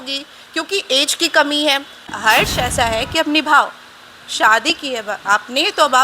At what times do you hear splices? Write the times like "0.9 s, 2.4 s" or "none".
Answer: 2.0 s